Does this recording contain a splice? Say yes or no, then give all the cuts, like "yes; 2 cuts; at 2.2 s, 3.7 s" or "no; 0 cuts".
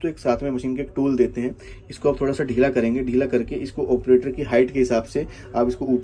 no; 0 cuts